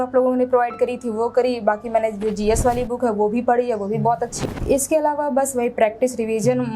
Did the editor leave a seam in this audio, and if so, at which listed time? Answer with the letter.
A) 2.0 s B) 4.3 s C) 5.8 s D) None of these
B